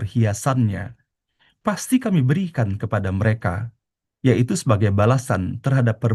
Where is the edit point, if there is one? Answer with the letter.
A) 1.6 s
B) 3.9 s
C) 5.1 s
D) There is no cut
D